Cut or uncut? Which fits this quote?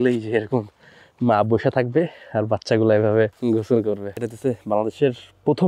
cut